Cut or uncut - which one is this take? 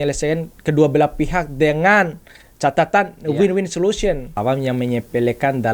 cut